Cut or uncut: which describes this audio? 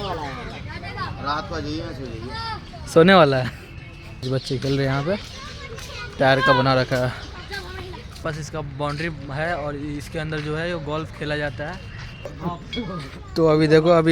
cut